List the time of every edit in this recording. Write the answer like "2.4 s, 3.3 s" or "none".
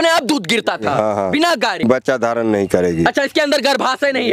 1.8 s